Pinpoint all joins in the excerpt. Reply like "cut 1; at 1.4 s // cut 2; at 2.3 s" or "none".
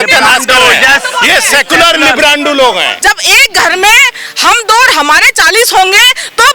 cut 1; at 2.9 s